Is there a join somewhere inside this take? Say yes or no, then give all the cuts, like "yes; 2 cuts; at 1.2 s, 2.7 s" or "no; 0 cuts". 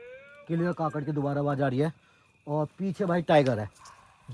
no; 0 cuts